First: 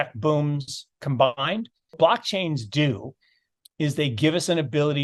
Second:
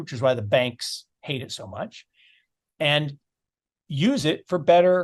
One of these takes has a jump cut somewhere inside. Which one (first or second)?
first